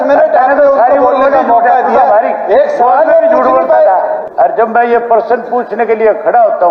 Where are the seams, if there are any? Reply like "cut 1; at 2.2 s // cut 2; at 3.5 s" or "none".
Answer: cut 1; at 4.2 s